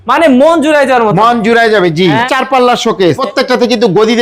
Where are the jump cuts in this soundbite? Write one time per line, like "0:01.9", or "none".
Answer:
0:02.3
0:03.2